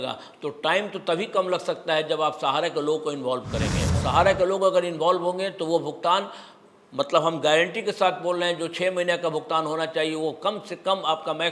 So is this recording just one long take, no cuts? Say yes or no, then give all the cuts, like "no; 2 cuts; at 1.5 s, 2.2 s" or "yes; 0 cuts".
no; 1 cut; at 4.0 s